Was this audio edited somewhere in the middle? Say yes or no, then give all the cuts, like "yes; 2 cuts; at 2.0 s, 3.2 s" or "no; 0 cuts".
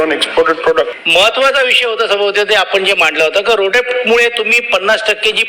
yes; 1 cut; at 1.0 s